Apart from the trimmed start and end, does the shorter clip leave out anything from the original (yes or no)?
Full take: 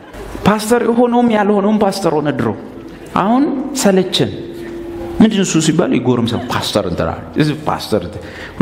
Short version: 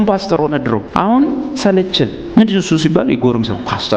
yes